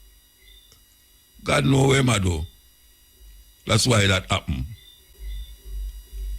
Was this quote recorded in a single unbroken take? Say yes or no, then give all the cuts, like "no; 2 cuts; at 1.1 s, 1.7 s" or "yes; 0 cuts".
no; 1 cut; at 5.1 s